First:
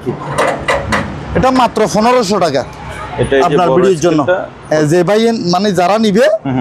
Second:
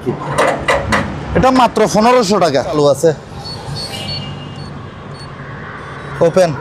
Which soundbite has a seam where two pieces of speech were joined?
second; 1 cut; at 2.7 s

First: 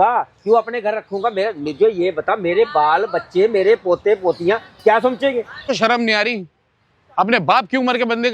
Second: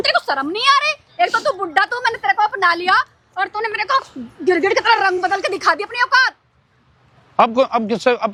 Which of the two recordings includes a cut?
first; 1 cut; at 5.7 s

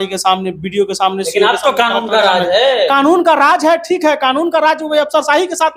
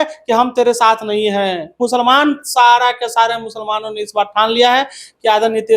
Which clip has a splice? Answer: second; 1 cut; at 1.8 s

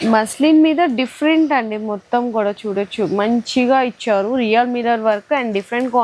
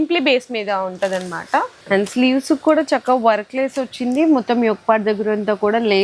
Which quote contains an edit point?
second; 1 cut; at 1.8 s

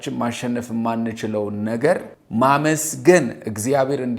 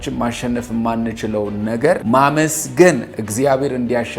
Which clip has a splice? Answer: second; 1 cut; at 2.0 s

